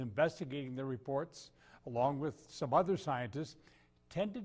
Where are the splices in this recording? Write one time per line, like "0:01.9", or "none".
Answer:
0:02.4